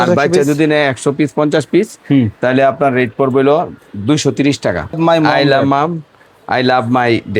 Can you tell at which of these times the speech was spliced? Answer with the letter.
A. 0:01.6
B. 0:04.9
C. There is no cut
B